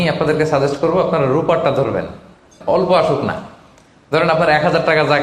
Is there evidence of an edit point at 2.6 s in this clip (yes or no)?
yes